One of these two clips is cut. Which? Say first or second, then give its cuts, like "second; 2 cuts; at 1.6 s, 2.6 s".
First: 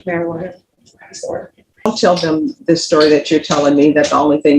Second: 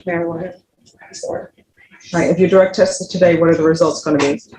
first; 1 cut; at 1.9 s